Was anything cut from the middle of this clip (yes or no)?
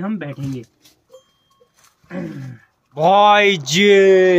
yes